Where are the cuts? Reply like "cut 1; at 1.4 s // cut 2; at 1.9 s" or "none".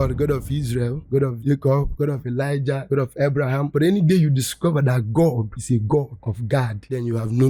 none